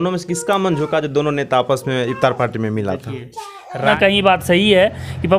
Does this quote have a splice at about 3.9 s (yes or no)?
yes